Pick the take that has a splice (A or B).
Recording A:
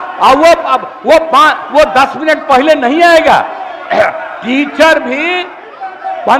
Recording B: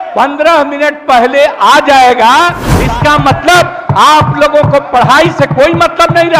B